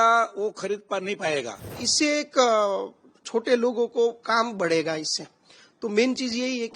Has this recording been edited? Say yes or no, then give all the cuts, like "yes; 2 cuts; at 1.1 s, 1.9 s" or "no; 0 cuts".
yes; 1 cut; at 1.9 s